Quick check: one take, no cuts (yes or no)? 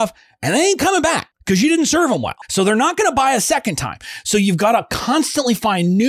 no